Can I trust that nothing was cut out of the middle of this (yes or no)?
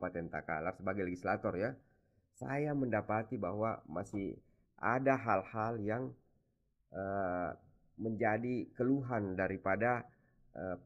yes